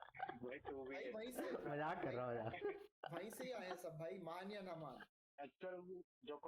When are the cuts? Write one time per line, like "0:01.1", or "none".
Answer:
0:05.3